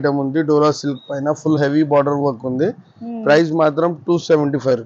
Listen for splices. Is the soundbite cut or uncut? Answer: uncut